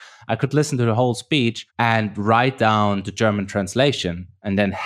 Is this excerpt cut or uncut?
cut